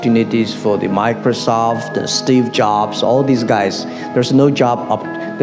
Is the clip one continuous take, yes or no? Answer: yes